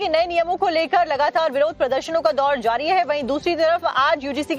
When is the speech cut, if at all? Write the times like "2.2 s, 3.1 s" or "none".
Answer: 1.7 s